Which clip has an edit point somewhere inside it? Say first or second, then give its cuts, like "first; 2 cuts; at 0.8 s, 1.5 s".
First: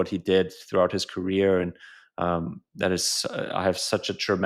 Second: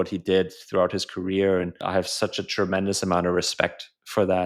second; 1 cut; at 1.8 s